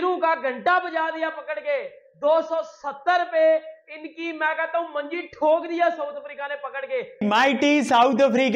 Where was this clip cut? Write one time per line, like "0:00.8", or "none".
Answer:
0:07.1